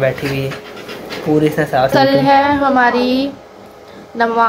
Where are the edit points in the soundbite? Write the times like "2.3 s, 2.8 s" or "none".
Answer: 1.9 s